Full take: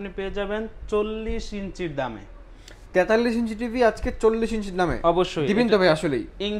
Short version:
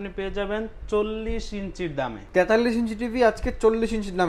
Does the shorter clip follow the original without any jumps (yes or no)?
no